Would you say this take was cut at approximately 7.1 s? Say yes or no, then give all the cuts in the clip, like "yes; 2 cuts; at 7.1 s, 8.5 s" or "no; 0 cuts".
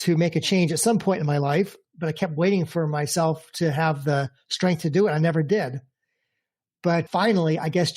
yes; 2 cuts; at 1.8 s, 7.1 s